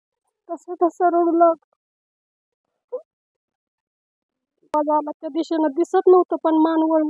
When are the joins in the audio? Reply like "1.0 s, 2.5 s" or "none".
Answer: 4.7 s